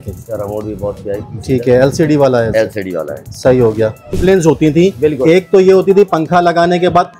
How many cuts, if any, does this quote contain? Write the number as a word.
one